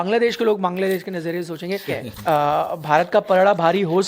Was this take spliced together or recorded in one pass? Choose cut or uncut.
cut